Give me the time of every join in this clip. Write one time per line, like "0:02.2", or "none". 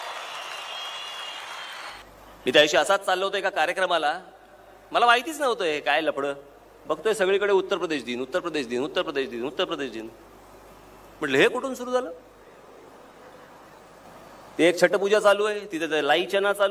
0:02.0